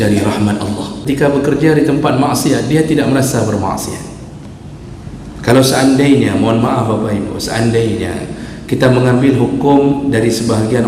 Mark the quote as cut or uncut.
cut